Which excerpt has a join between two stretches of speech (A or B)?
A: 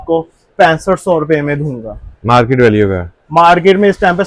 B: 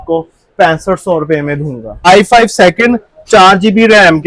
B